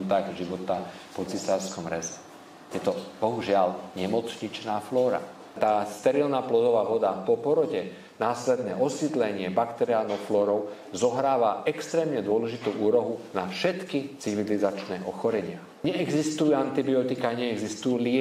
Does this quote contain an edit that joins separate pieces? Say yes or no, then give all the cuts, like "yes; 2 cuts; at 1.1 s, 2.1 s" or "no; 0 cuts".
yes; 2 cuts; at 5.4 s, 15.8 s